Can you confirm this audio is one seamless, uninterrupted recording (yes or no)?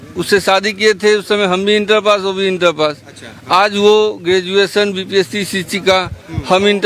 yes